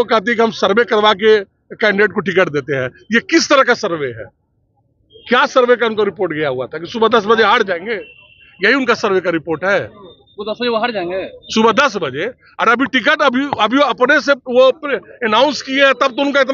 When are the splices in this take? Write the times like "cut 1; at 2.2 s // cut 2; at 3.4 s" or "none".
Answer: none